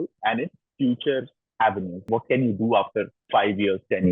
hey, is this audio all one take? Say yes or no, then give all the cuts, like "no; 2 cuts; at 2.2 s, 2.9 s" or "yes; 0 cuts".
no; 2 cuts; at 1.4 s, 3.2 s